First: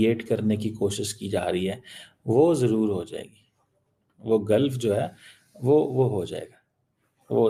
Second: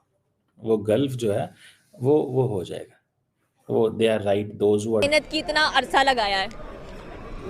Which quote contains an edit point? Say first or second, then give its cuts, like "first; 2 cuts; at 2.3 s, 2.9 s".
second; 1 cut; at 5.0 s